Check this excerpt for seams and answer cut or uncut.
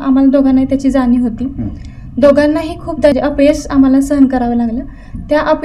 cut